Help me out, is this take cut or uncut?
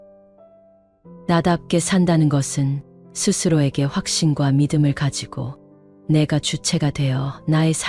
uncut